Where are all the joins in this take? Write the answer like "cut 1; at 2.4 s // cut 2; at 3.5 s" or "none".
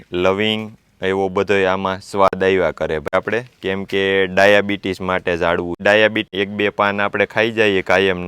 cut 1; at 3.1 s // cut 2; at 6.3 s